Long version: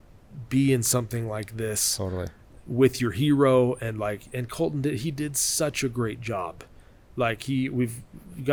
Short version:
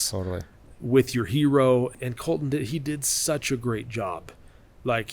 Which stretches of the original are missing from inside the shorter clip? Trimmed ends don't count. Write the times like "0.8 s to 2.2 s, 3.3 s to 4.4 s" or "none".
3.8 s to 4.3 s